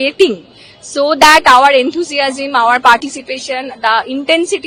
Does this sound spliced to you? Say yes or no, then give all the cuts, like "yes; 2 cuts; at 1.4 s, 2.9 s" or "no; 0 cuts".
no; 0 cuts